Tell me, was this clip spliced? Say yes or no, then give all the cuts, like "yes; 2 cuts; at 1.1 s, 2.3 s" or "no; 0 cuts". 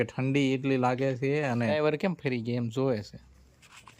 yes; 1 cut; at 1.8 s